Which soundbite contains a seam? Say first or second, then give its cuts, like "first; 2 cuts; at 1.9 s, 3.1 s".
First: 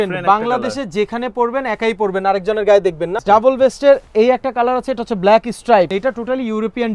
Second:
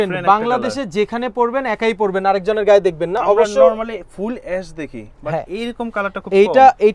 first; 2 cuts; at 3.2 s, 5.9 s